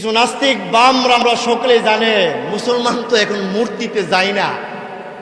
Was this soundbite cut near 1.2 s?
yes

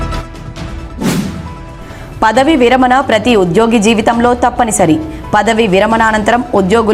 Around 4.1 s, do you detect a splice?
no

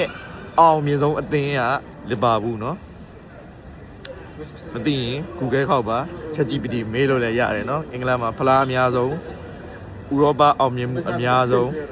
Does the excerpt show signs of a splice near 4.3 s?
no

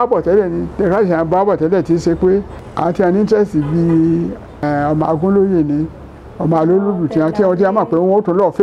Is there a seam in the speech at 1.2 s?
no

